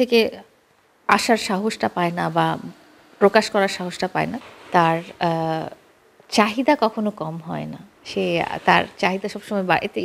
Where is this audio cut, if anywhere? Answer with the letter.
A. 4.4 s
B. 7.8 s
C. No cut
A